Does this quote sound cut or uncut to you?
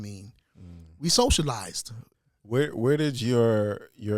cut